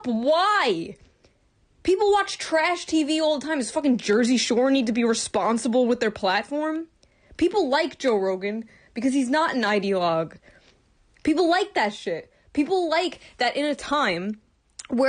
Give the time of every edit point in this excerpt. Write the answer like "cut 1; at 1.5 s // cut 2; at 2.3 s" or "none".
cut 1; at 9.3 s